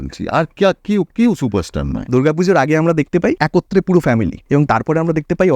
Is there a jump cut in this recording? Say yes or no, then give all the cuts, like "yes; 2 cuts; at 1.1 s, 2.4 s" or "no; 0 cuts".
yes; 3 cuts; at 2.0 s, 3.4 s, 4.4 s